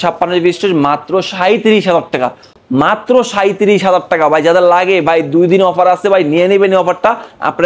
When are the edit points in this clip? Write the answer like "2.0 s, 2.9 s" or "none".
none